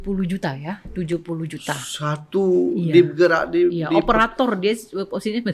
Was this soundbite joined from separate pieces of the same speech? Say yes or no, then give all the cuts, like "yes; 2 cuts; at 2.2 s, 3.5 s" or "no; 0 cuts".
no; 0 cuts